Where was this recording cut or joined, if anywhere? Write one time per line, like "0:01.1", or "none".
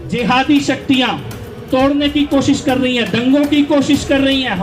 none